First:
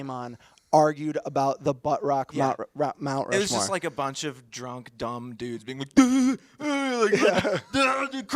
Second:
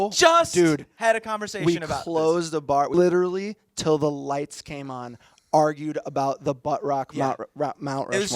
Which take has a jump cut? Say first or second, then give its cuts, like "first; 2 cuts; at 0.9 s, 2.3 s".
second; 1 cut; at 2.9 s